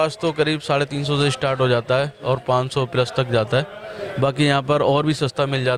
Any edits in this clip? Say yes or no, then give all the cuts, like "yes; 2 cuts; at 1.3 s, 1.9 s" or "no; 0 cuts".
no; 0 cuts